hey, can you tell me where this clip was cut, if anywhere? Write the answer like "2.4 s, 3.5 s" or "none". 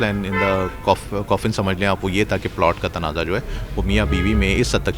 none